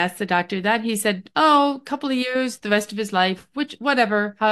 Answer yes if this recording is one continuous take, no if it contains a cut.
yes